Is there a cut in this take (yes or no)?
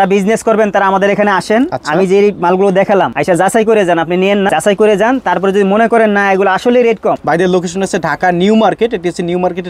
yes